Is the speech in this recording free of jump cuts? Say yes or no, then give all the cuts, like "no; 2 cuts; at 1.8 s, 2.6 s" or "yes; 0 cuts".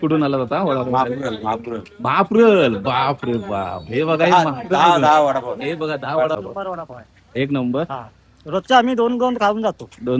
no; 1 cut; at 6.4 s